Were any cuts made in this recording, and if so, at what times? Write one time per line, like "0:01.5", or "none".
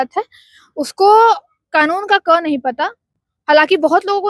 none